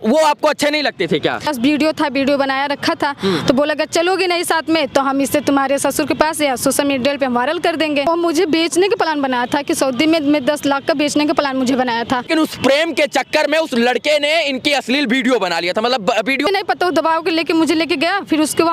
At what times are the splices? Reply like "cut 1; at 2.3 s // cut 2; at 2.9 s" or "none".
cut 1; at 1.5 s // cut 2; at 8.1 s // cut 3; at 12.3 s // cut 4; at 16.5 s